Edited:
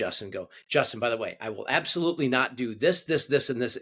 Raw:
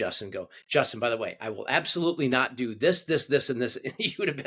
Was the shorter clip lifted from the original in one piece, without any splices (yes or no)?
yes